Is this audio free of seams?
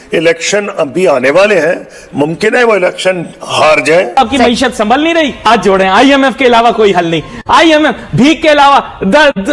no; 1 cut; at 4.2 s

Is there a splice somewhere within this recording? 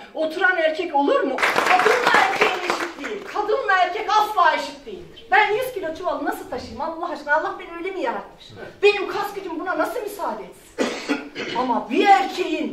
yes; 1 cut; at 1.4 s

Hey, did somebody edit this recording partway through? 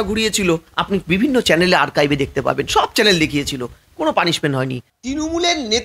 yes; 1 cut; at 4.9 s

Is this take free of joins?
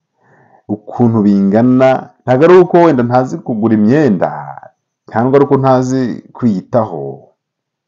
no; 1 cut; at 2.1 s

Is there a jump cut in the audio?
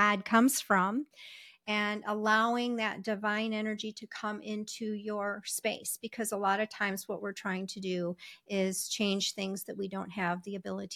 no; 0 cuts

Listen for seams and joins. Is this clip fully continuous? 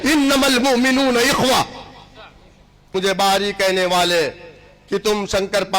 no; 1 cut; at 2.9 s

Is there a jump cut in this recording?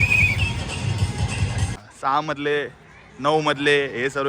yes; 1 cut; at 1.7 s

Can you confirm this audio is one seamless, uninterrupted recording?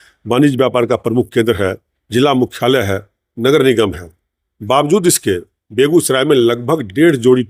yes; 0 cuts

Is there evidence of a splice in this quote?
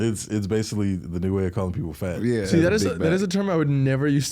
yes; 1 cut; at 2.5 s

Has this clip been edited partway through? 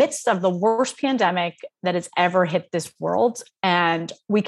no; 0 cuts

